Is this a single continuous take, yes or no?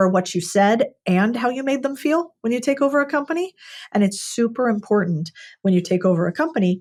yes